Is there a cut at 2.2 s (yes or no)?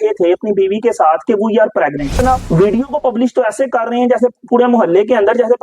yes